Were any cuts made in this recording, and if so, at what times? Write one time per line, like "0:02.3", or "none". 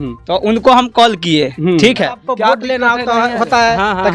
0:02.2

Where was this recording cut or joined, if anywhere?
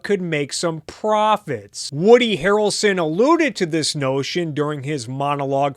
0:01.8

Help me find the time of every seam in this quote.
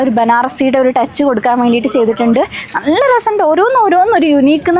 none

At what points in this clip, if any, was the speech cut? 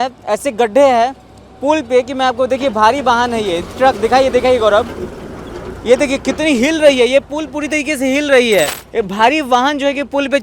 0:08.8

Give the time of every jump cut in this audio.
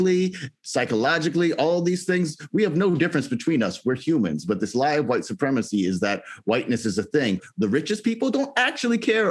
0:07.4

